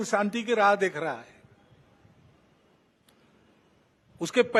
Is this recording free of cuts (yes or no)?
yes